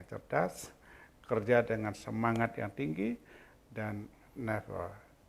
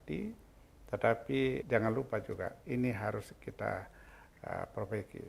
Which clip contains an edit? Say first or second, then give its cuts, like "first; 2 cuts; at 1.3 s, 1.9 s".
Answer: second; 1 cut; at 1.6 s